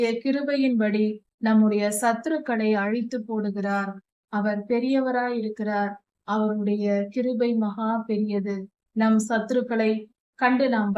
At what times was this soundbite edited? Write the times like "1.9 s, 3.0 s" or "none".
none